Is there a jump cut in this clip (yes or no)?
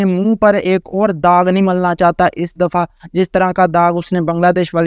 no